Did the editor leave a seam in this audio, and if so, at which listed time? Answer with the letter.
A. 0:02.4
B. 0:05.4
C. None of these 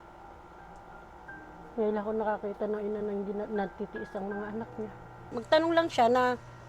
B